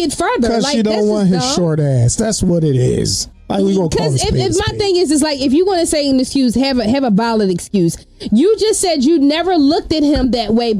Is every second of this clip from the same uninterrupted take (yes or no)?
yes